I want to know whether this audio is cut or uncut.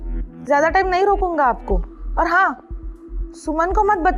uncut